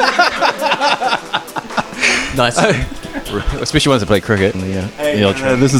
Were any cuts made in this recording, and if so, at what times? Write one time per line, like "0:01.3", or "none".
0:04.6